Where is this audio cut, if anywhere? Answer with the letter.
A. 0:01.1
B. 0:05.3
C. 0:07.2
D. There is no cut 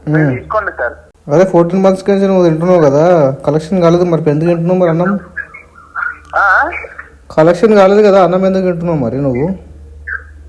A